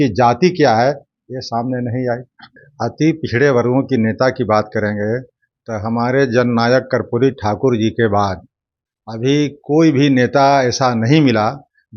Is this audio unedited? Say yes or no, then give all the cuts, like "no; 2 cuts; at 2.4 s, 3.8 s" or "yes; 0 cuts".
no; 1 cut; at 2.4 s